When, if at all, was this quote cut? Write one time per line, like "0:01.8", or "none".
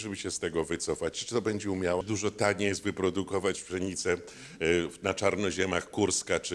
0:02.0